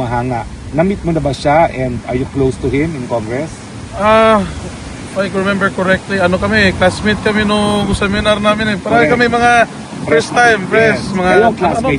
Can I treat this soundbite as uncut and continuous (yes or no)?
yes